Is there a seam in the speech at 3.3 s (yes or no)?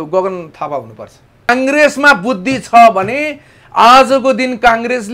no